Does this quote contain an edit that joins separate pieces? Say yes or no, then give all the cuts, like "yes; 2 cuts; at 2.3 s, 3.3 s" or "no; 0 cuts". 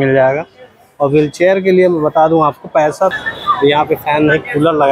yes; 1 cut; at 3.1 s